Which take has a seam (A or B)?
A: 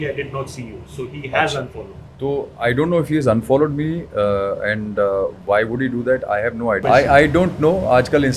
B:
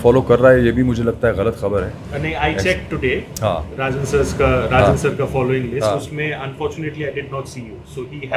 A